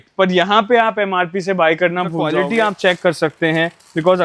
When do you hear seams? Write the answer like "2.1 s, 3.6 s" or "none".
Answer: 2.3 s